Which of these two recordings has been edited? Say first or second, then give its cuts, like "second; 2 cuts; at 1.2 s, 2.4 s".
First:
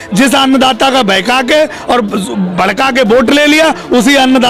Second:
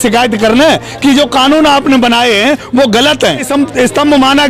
second; 1 cut; at 3.5 s